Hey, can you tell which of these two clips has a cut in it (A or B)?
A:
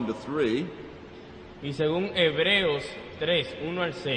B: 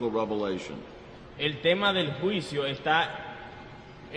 A